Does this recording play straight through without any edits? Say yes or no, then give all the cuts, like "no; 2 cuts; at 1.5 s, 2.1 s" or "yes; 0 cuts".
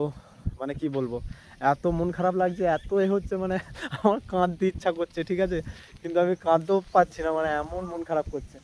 yes; 0 cuts